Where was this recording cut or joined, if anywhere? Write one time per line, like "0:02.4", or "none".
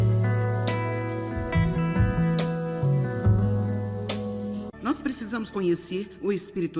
0:04.7

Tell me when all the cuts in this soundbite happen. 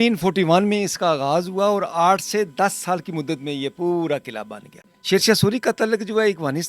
0:04.9

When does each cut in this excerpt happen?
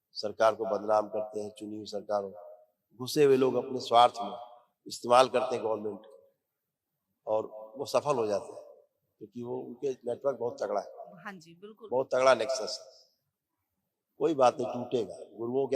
none

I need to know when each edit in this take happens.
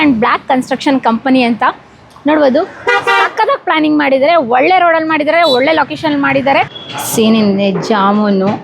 0:06.7

